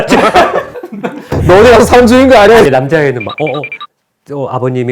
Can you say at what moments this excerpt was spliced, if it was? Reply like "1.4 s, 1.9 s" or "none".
2.7 s